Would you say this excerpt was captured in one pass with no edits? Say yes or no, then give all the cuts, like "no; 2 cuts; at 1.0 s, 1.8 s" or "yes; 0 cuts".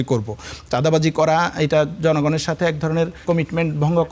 no; 1 cut; at 3.2 s